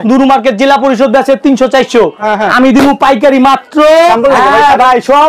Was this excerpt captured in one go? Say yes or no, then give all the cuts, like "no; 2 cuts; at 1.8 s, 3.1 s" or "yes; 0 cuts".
no; 1 cut; at 4.1 s